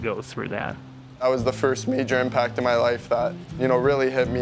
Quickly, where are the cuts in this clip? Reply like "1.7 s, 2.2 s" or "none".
1.0 s, 3.6 s